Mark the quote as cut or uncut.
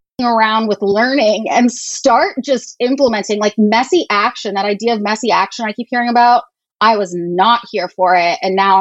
uncut